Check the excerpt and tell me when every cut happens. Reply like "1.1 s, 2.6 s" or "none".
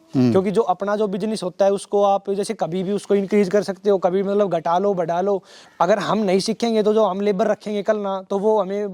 5.6 s